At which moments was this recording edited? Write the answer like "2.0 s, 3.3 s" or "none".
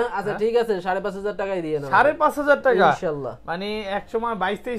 none